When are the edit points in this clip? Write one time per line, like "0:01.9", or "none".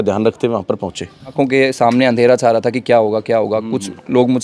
0:01.3